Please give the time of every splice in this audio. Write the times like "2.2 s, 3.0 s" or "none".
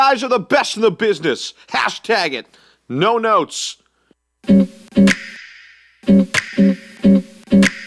4.3 s, 6.8 s